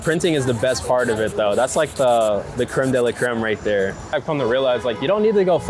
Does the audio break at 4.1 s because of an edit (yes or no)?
yes